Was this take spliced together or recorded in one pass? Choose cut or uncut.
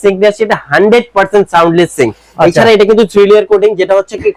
uncut